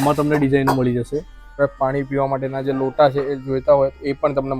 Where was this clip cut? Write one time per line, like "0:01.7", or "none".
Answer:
0:01.6